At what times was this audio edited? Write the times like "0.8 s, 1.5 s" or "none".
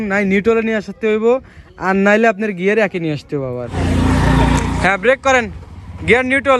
3.7 s